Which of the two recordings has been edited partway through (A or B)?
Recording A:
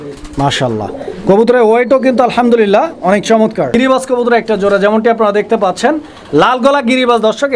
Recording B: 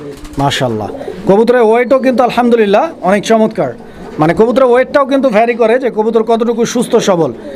A